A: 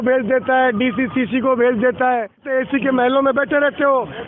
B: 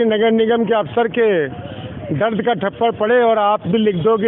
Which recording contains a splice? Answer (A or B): A